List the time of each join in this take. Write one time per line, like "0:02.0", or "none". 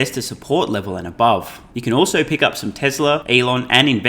0:01.6
0:03.2